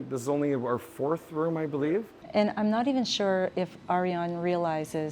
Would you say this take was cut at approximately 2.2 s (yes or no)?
yes